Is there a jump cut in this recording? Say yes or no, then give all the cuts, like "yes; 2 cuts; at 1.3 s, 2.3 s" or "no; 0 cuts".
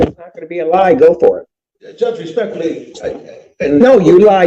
no; 0 cuts